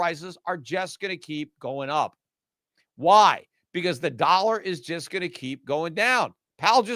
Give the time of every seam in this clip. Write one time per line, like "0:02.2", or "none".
none